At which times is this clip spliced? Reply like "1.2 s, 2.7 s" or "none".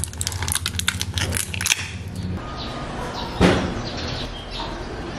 2.4 s